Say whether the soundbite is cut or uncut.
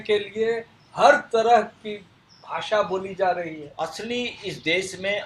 cut